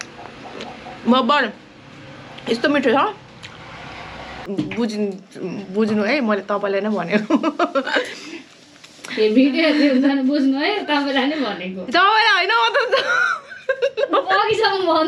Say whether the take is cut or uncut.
cut